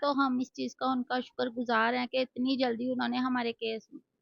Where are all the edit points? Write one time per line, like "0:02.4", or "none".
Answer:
none